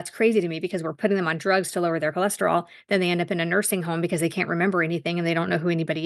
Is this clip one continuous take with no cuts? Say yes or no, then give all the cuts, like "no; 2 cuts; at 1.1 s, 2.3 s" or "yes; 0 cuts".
yes; 0 cuts